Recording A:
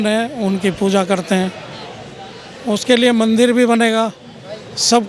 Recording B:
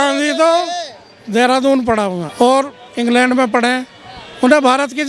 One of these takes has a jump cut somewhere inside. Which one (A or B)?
B